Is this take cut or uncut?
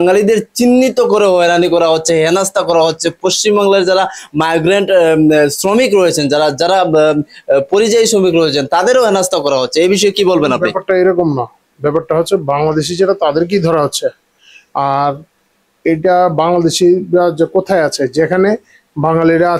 uncut